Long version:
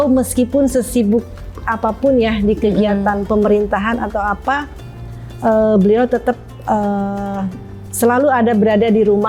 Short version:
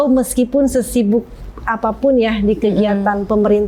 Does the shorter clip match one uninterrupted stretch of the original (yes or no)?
yes